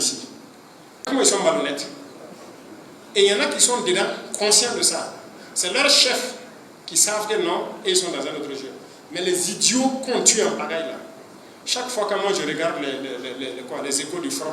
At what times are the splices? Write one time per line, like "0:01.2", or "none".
0:01.1